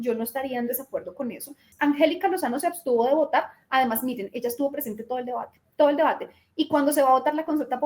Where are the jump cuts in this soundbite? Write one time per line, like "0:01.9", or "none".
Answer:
0:01.6